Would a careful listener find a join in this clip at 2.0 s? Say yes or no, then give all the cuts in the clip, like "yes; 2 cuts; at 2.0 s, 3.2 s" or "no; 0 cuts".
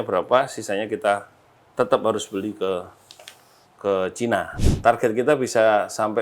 no; 1 cut; at 4.5 s